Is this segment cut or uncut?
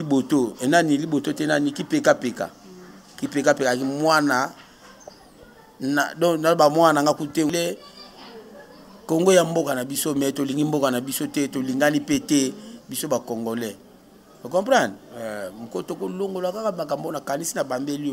cut